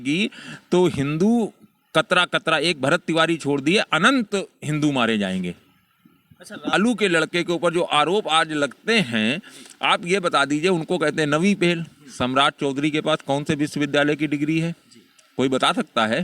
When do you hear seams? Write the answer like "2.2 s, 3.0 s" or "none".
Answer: 6.7 s